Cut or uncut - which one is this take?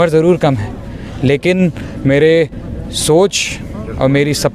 uncut